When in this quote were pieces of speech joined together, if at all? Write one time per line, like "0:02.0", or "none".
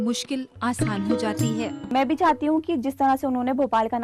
0:01.9

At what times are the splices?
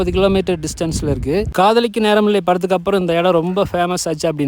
0:01.5

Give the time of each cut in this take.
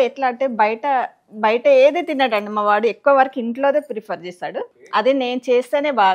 0:04.8

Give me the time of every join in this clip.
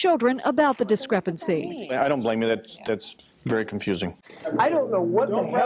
0:04.2

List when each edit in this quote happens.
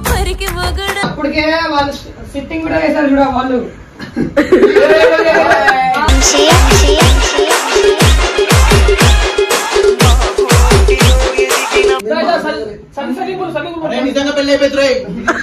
0:01.0

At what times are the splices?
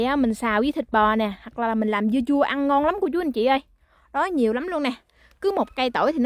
none

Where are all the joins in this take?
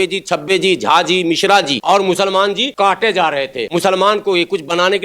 0:01.8
0:02.7
0:03.6

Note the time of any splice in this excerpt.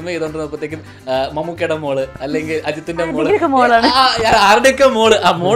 none

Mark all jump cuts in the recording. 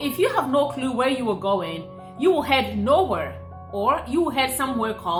none

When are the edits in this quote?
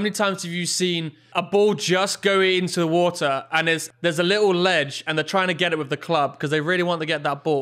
0:01.2
0:03.9

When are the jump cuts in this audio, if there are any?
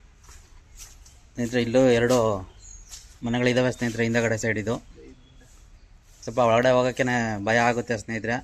none

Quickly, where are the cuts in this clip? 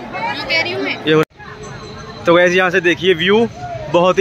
0:01.2

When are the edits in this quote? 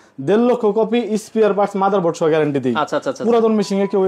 none

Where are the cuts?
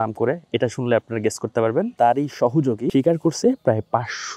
0:01.9
0:02.9

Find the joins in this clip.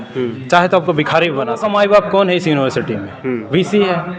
0:01.6

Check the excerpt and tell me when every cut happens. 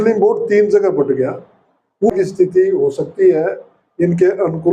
0:02.1

